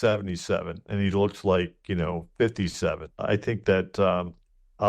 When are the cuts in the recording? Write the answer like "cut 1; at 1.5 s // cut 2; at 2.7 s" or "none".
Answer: cut 1; at 3.2 s